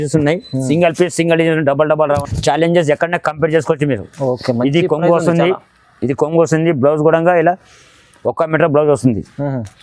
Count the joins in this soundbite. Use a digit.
1